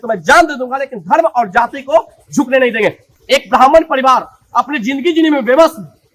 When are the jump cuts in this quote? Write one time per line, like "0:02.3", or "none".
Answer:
0:03.1